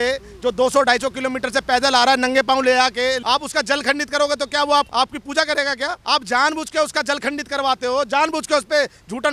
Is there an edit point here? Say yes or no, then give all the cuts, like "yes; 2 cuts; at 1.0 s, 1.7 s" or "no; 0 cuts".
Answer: yes; 3 cuts; at 3.2 s, 4.9 s, 6.0 s